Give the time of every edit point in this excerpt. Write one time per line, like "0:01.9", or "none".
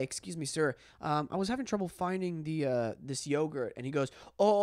none